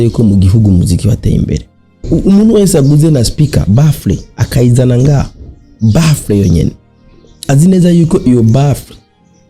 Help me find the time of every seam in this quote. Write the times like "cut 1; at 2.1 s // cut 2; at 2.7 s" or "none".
cut 1; at 2.0 s